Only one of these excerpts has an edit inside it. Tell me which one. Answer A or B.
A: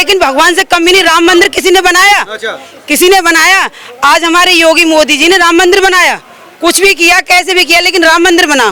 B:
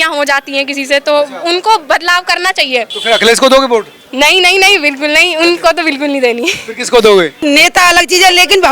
B